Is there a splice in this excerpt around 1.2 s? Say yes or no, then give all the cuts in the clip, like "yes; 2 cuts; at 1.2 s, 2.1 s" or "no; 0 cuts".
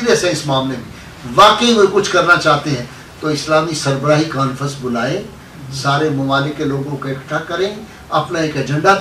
no; 0 cuts